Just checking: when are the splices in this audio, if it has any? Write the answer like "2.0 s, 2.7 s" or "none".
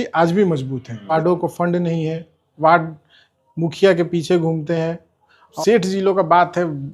1.1 s, 5.6 s